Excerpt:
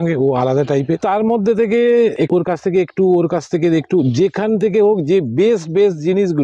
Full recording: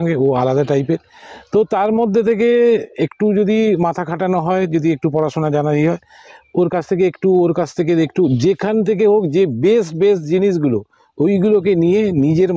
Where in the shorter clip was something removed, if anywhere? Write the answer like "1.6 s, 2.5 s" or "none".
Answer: 1.0 s, 2.2 s